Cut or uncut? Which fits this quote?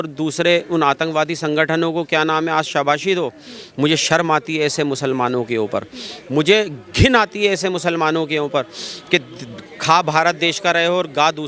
uncut